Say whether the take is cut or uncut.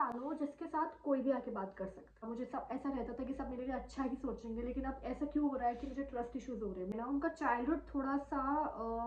cut